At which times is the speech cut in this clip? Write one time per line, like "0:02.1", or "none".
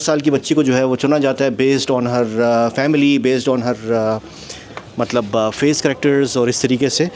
none